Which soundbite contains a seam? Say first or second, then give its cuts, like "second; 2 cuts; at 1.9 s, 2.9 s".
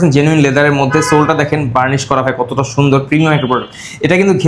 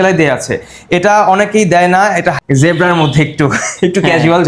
second; 1 cut; at 2.4 s